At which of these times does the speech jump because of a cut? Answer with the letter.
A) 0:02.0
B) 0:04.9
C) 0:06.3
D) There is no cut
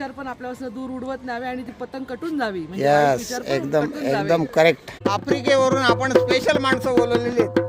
B